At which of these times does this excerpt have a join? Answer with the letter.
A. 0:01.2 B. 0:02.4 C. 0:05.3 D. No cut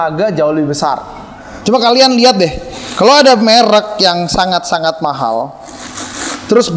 A